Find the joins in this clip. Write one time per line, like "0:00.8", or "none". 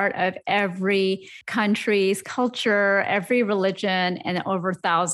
0:01.4